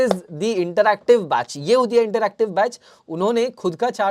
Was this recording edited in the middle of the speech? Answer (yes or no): no